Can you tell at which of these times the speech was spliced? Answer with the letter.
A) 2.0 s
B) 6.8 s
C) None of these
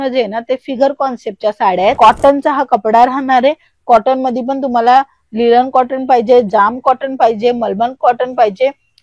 A